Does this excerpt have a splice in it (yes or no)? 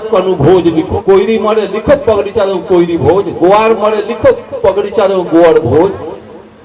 yes